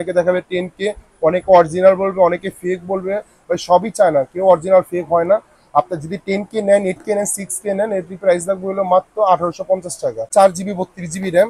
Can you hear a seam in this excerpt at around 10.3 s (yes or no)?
yes